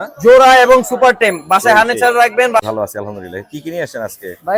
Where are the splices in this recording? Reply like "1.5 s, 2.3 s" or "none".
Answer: 2.6 s